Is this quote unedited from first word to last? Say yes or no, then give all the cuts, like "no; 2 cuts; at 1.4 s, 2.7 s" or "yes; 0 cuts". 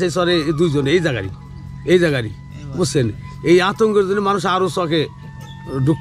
yes; 0 cuts